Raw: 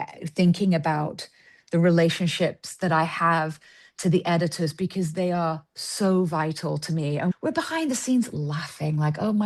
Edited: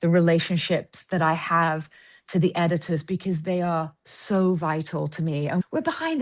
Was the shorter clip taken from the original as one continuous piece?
yes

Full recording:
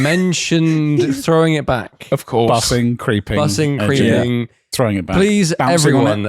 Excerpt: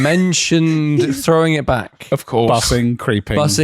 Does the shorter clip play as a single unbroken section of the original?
yes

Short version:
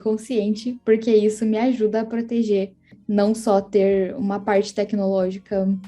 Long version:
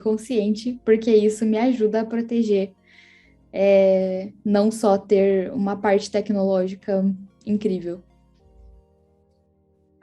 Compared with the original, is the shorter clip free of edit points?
no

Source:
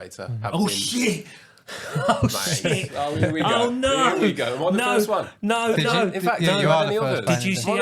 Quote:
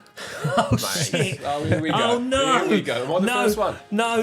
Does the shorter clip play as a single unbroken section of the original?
yes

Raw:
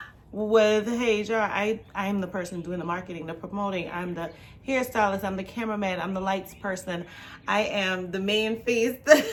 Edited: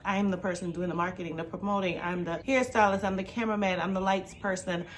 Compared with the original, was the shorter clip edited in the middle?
yes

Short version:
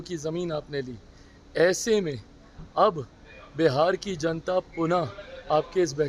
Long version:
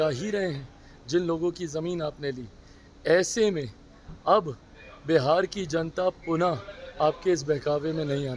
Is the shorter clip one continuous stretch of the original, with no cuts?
yes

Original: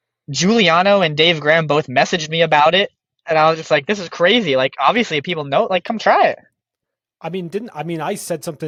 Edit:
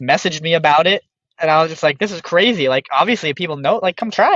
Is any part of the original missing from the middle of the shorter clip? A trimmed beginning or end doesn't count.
no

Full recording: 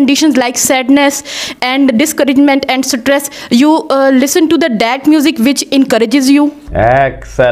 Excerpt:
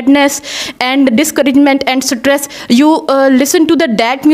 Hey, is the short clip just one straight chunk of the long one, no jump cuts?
yes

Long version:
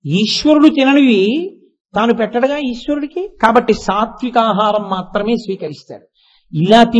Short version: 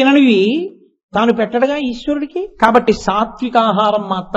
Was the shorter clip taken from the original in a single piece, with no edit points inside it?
yes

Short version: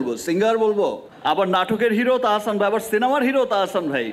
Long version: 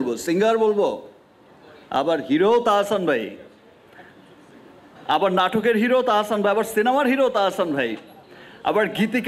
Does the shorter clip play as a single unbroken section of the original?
no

